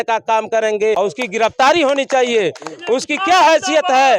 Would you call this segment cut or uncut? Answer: cut